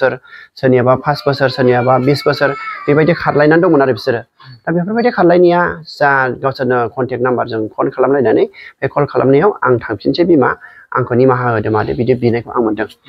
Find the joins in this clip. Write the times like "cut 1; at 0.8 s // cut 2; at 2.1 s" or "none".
none